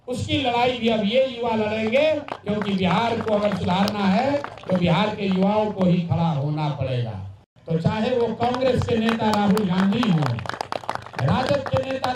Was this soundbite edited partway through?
yes; 1 cut; at 7.5 s

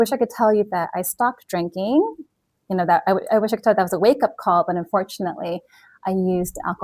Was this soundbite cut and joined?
no; 0 cuts

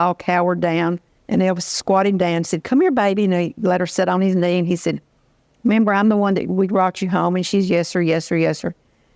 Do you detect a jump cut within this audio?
yes; 1 cut; at 1.1 s

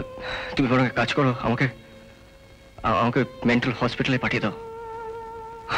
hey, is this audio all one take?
yes; 0 cuts

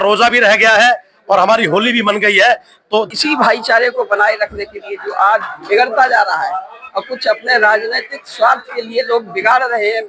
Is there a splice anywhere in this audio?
yes; 1 cut; at 3.1 s

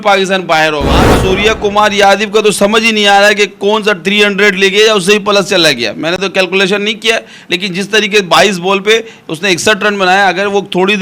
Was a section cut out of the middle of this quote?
yes; 1 cut; at 1.1 s

